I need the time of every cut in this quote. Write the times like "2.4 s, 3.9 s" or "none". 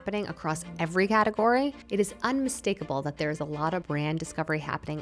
3.8 s